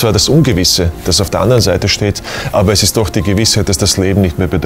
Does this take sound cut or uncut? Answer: uncut